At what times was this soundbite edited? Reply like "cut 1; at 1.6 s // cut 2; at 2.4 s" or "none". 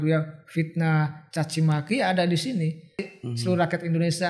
cut 1; at 3.1 s